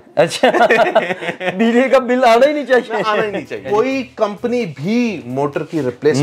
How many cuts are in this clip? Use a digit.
1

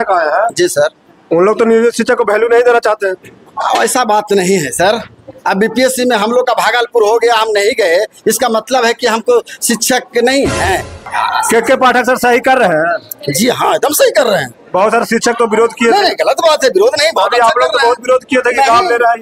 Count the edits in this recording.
1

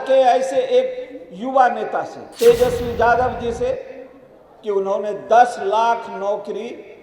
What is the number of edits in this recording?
1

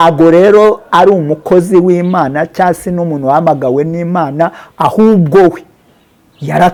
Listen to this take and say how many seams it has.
0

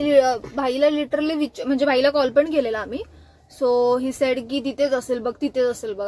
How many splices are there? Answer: 0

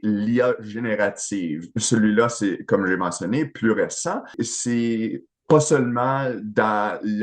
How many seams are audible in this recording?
1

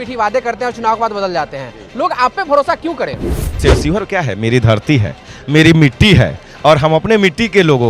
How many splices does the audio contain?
1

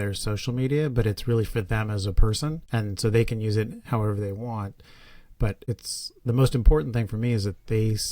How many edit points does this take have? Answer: 2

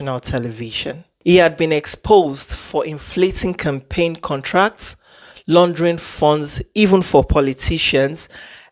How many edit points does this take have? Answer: 1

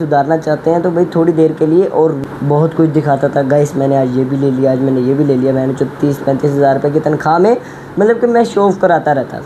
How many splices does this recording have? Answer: 1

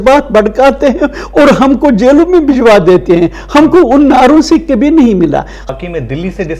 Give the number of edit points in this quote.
1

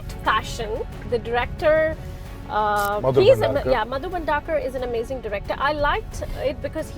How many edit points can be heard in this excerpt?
1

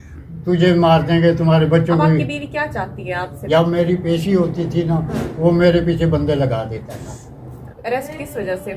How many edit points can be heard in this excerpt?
2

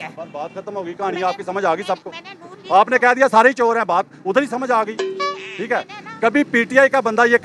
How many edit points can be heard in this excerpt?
0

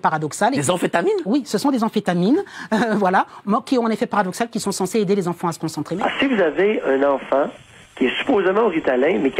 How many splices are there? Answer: 1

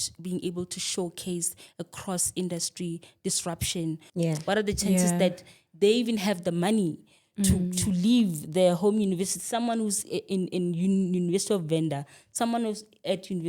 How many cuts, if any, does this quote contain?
1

